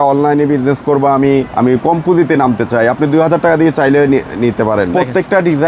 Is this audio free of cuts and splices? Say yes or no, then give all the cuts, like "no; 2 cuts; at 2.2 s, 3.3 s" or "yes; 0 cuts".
no; 2 cuts; at 1.5 s, 4.9 s